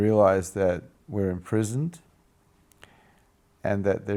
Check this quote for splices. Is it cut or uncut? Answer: uncut